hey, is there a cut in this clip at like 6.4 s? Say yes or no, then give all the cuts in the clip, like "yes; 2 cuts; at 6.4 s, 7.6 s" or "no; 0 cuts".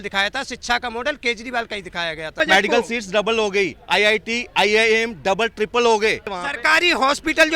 yes; 2 cuts; at 2.4 s, 6.4 s